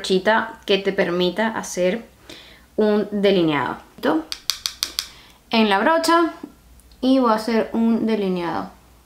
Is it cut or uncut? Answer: cut